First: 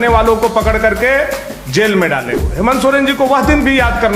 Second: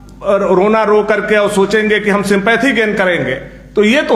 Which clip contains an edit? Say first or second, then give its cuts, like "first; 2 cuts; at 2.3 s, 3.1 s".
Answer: first; 1 cut; at 2.4 s